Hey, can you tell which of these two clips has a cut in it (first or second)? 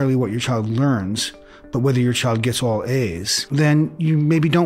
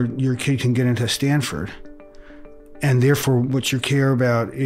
first